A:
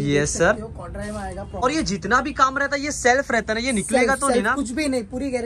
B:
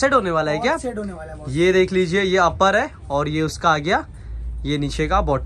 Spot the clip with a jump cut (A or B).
A